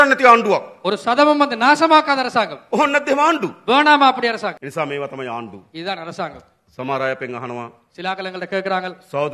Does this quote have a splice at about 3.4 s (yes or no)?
no